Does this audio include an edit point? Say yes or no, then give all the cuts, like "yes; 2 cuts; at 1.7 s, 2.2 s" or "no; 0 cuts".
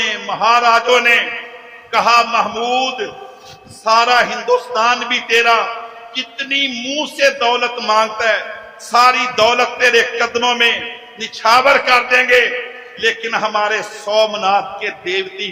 no; 0 cuts